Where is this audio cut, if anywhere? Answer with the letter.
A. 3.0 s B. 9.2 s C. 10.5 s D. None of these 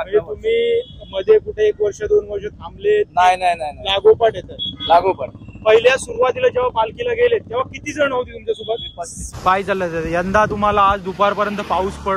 B